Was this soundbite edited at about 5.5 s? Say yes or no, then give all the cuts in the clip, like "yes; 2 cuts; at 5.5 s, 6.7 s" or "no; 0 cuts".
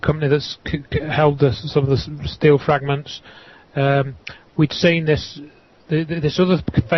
yes; 1 cut; at 5.5 s